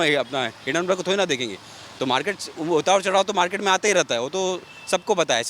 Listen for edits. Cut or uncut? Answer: uncut